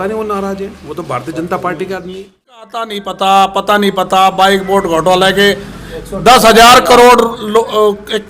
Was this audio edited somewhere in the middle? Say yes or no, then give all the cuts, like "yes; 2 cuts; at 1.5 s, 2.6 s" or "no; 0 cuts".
yes; 1 cut; at 2.7 s